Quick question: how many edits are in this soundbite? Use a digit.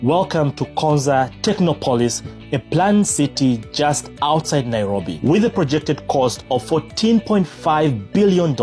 0